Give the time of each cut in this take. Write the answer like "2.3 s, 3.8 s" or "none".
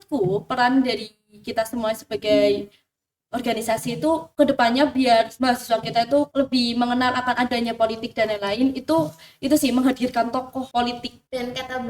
4.3 s, 5.3 s, 6.3 s, 10.8 s